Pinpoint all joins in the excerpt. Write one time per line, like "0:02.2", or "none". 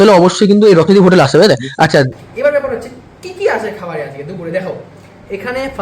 0:02.2